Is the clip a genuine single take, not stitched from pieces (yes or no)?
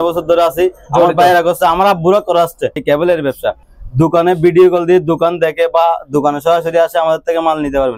no